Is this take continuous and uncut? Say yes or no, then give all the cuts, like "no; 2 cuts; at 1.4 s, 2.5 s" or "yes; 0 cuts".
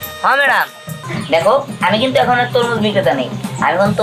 no; 1 cut; at 1.1 s